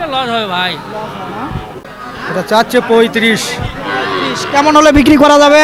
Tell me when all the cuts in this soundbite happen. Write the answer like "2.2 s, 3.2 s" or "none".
1.8 s